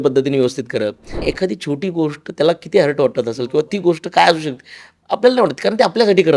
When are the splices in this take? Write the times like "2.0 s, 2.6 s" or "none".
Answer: 1.2 s